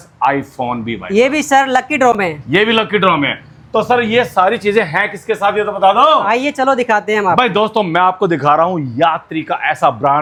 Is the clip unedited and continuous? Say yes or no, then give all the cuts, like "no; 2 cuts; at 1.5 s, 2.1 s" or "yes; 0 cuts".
yes; 0 cuts